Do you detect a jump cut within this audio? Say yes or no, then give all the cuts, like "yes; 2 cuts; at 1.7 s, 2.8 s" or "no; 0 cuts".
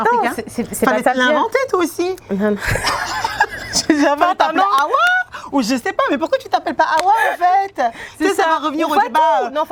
no; 0 cuts